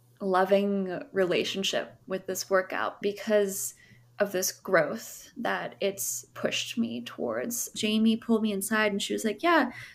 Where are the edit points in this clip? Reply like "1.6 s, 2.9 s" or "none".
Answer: 3.0 s, 7.7 s

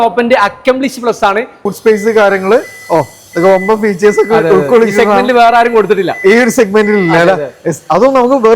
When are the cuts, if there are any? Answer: 1.7 s

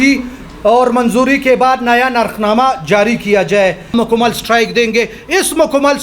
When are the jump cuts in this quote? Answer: 3.9 s

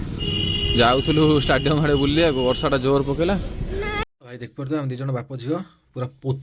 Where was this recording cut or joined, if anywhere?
4.0 s

